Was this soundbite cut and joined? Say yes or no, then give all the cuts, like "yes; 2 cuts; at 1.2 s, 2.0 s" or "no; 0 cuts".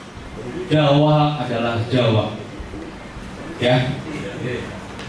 no; 0 cuts